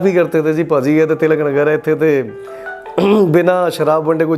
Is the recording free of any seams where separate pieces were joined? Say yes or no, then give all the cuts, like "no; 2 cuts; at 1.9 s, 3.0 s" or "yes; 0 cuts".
yes; 0 cuts